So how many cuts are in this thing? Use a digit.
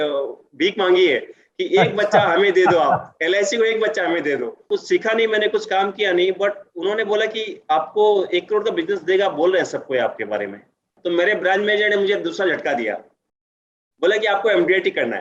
2